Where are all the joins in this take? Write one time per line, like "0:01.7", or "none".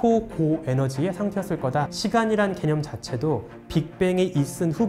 0:01.9